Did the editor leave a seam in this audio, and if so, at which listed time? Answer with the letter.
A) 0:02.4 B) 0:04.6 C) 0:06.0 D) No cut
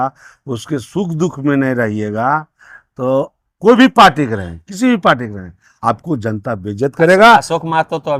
D